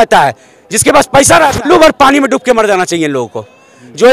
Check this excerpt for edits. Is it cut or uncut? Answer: cut